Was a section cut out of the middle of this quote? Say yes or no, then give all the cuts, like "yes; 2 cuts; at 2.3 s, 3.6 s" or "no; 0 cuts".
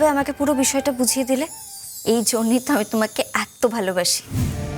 no; 0 cuts